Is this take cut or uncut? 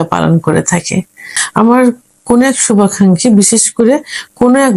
cut